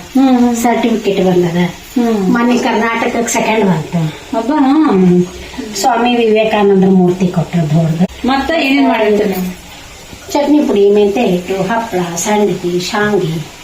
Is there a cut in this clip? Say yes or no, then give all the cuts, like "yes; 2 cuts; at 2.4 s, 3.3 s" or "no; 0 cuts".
yes; 1 cut; at 8.2 s